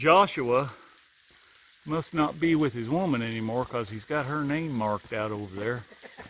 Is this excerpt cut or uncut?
uncut